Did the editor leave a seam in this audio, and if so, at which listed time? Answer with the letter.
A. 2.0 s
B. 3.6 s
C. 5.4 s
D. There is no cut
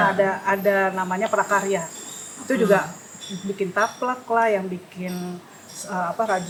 D